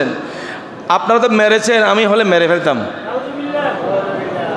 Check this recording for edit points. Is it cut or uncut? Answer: uncut